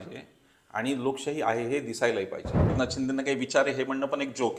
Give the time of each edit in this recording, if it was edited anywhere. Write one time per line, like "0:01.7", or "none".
0:02.7